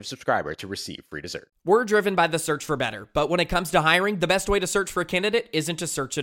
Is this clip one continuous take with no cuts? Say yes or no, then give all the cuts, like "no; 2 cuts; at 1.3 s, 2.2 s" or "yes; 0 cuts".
no; 1 cut; at 1.4 s